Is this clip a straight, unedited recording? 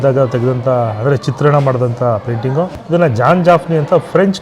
no; 1 cut; at 2.8 s

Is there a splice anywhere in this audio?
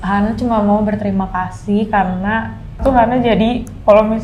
yes; 1 cut; at 2.8 s

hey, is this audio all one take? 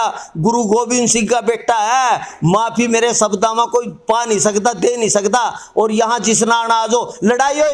yes; 0 cuts

